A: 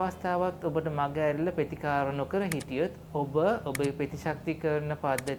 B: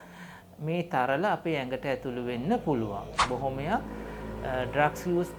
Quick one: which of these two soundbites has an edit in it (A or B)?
B